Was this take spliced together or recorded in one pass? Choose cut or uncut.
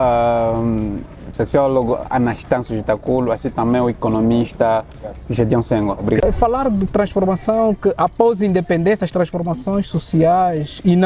cut